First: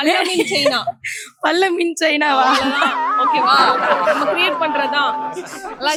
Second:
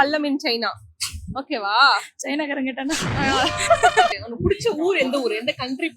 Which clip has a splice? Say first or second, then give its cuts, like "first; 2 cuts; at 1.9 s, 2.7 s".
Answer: second; 1 cut; at 4.2 s